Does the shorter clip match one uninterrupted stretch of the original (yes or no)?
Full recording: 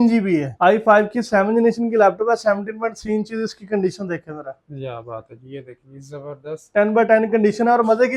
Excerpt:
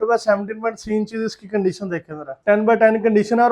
no